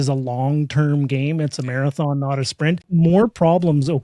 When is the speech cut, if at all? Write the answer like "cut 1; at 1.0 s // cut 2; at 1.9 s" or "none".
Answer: cut 1; at 2.8 s